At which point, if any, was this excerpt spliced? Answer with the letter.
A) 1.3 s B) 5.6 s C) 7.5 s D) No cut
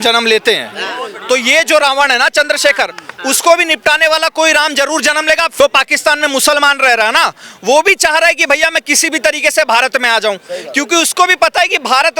B